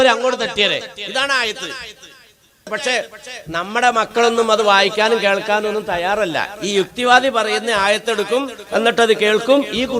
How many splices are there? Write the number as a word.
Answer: one